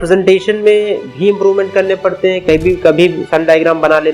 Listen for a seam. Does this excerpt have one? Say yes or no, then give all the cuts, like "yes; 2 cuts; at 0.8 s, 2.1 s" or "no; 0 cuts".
no; 0 cuts